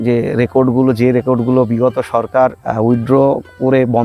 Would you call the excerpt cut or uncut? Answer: cut